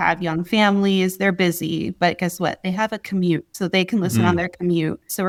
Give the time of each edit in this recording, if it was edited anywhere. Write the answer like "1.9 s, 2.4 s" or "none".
none